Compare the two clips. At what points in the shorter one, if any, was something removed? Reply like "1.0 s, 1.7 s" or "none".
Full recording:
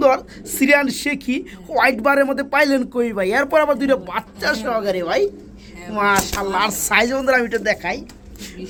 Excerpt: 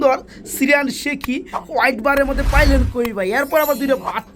none